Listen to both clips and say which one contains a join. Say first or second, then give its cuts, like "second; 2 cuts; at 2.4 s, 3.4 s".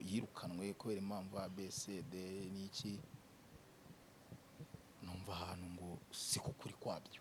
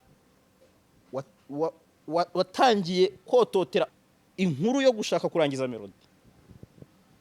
second; 1 cut; at 3.9 s